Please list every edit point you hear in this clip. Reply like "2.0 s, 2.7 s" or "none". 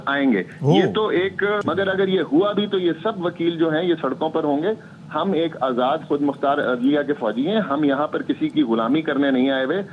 1.6 s